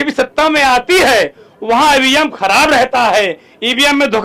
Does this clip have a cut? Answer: no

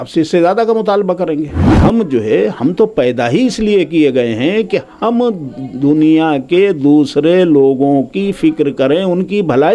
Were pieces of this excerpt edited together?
yes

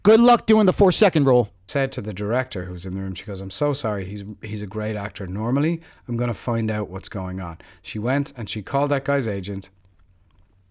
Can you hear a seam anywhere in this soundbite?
yes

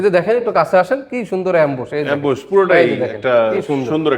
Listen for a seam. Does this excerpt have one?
no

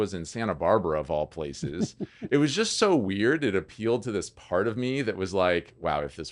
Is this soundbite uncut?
yes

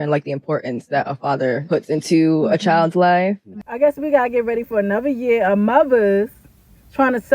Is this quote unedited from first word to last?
no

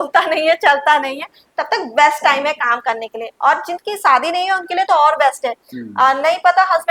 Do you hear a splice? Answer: no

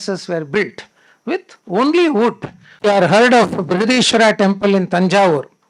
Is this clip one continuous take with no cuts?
no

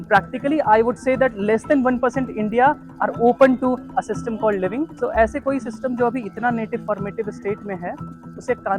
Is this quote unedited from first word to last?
no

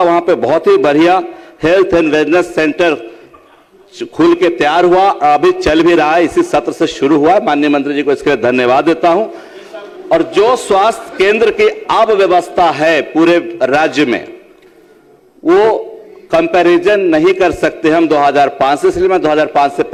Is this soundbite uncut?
yes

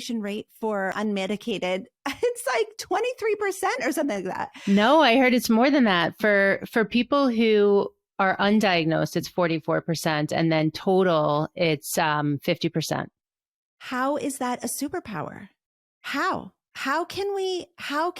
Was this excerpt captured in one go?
no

